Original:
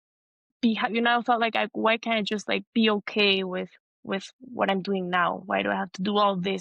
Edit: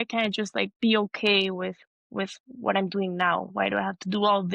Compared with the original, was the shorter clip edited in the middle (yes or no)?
no